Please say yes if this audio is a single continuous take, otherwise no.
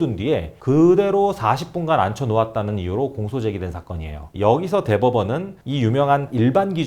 no